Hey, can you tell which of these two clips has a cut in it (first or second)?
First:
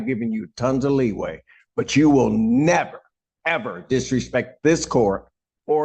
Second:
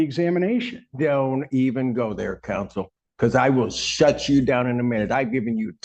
second